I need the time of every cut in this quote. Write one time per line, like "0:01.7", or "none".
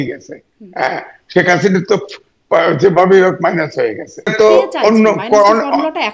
0:04.3